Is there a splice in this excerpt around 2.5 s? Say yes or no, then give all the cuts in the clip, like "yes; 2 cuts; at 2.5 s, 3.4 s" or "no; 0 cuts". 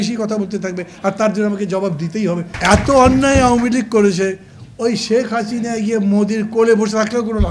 yes; 1 cut; at 2.5 s